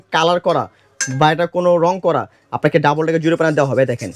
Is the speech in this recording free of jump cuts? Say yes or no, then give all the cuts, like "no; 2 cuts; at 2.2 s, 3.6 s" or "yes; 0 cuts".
yes; 0 cuts